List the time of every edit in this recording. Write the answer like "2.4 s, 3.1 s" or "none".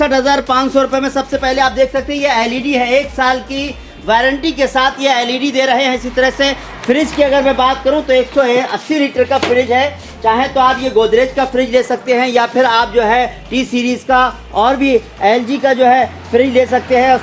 none